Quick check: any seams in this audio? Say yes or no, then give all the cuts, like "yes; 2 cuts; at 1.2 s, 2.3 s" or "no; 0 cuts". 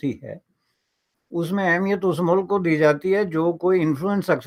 no; 0 cuts